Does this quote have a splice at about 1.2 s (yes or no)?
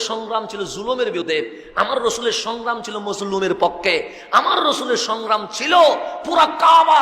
yes